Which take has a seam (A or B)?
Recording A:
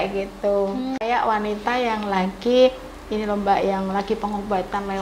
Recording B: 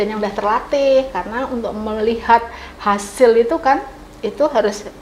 A